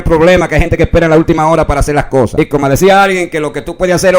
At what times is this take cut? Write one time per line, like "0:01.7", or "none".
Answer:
0:02.3